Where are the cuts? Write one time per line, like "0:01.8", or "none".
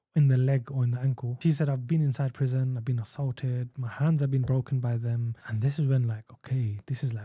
0:01.3
0:05.4